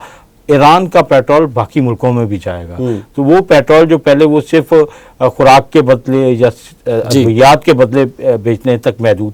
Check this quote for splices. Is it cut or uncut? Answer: uncut